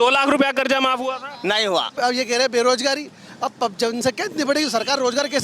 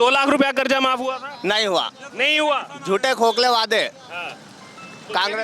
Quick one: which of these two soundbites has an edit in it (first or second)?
first